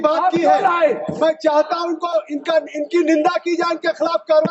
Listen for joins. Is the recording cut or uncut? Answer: uncut